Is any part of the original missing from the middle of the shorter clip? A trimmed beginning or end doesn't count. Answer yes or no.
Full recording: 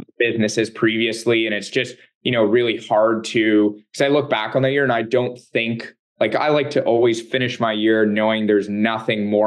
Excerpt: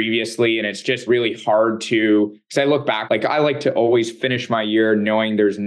yes